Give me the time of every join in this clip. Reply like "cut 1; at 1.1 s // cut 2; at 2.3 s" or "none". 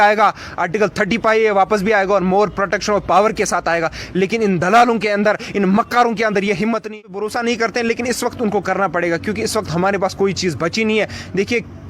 cut 1; at 6.9 s